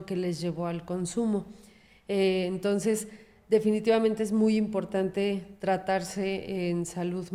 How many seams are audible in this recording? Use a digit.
0